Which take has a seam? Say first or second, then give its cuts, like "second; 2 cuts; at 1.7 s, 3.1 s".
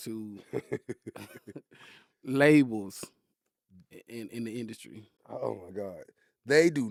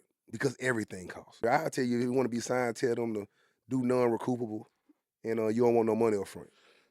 second; 1 cut; at 1.4 s